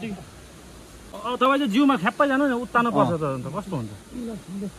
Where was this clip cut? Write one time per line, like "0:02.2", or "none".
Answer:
0:01.1